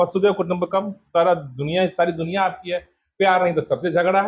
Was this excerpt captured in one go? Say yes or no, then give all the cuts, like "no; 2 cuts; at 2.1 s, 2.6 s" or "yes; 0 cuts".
yes; 0 cuts